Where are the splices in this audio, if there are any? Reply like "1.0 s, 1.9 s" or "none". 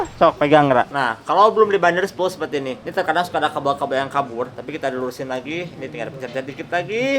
0.9 s, 2.8 s, 4.6 s